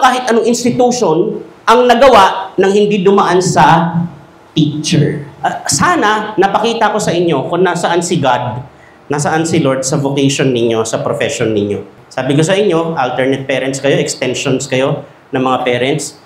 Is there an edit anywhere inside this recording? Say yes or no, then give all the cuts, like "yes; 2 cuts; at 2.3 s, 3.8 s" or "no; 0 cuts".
yes; 2 cuts; at 1.5 s, 5.3 s